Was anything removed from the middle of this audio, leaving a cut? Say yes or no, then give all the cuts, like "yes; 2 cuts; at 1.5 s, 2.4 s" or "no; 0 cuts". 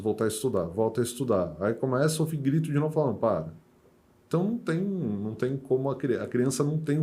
no; 0 cuts